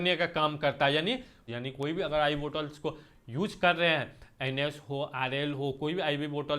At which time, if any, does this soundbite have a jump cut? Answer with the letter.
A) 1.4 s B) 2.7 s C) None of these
A